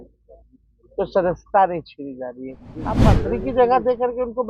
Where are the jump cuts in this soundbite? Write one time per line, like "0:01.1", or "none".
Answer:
0:03.1